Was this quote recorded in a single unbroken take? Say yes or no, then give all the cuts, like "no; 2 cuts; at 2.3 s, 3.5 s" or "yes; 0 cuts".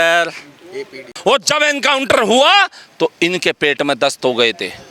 no; 1 cut; at 1.1 s